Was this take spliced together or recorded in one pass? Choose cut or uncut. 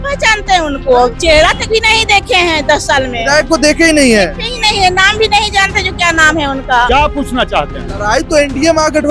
cut